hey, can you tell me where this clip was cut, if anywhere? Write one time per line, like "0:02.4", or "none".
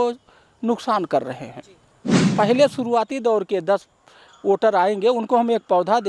0:02.3